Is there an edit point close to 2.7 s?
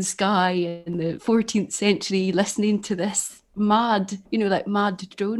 no; 2 cuts; at 1.0 s, 4.2 s

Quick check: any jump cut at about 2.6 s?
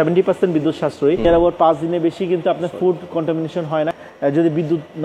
no; 2 cuts; at 1.2 s, 3.9 s

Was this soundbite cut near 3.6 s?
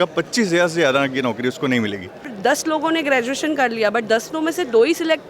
no; 1 cut; at 2.3 s

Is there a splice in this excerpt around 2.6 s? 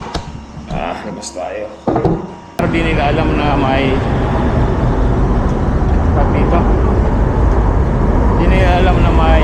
yes; 1 cut; at 2.6 s

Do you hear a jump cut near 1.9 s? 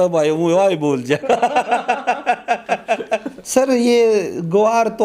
no; 1 cut; at 3.4 s

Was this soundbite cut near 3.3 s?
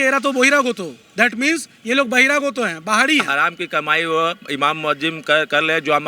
yes; 1 cut; at 3.3 s

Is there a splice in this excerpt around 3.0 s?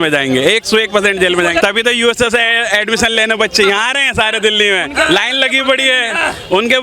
no; 1 cut; at 1.6 s

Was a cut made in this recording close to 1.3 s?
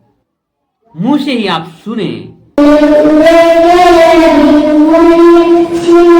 no; 1 cut; at 2.6 s

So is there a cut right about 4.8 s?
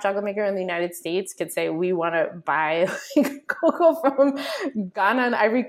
no; 0 cuts

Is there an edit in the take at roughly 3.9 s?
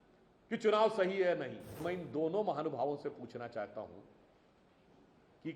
no; 1 cut; at 1.8 s

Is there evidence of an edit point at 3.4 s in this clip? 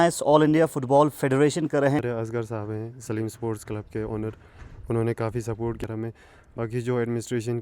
no; 2 cuts; at 2.0 s, 5.8 s

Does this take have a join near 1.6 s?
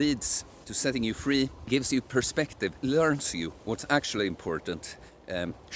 yes; 2 cuts; at 1.6 s, 2.8 s

